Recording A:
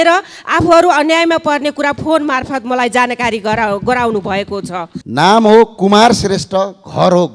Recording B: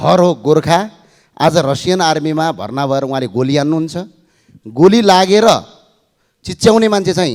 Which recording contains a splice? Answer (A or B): A